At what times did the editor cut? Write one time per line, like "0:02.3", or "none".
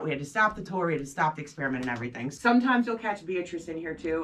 0:02.3